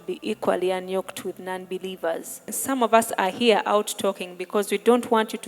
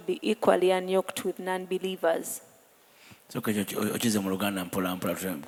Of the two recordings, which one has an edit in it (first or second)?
first